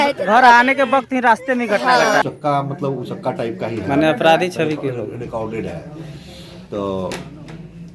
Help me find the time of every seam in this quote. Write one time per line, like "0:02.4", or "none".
0:02.2